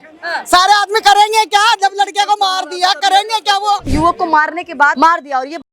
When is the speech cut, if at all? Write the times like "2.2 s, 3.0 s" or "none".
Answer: 3.9 s, 5.0 s